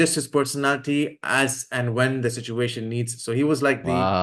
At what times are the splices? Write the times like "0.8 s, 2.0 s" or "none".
none